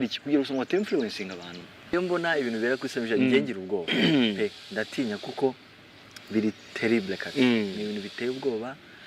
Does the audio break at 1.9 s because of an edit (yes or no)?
yes